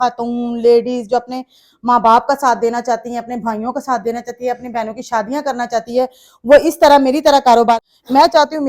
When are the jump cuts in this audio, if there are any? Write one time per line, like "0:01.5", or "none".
0:07.7